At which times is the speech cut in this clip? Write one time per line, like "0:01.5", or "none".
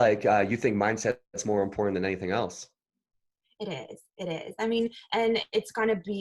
none